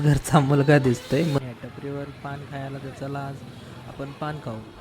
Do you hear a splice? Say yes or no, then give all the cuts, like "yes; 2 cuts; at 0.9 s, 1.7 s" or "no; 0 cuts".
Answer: yes; 1 cut; at 1.4 s